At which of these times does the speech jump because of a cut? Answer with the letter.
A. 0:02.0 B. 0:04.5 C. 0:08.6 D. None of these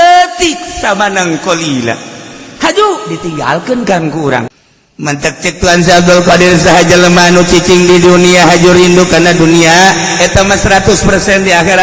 B